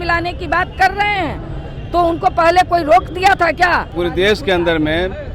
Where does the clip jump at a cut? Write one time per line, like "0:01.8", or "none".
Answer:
0:04.0